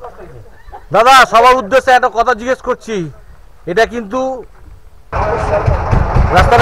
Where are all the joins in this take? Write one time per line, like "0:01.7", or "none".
0:05.1